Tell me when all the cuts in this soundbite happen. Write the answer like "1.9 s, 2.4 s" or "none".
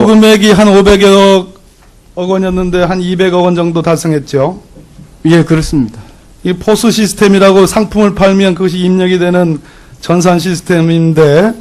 none

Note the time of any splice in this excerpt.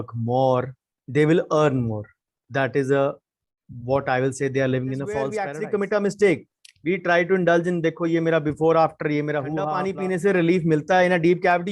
5.5 s, 9.7 s

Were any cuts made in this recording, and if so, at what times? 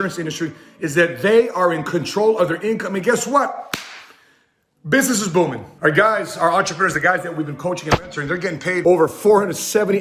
5.7 s, 8.8 s

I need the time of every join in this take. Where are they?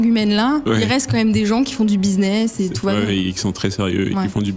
none

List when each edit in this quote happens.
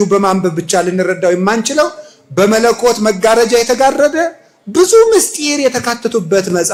none

